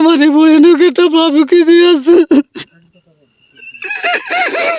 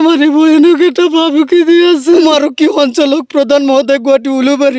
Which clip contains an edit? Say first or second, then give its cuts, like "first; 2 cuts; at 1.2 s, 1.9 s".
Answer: second; 1 cut; at 2.2 s